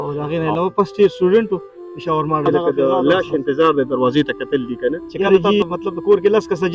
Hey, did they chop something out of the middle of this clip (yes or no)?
yes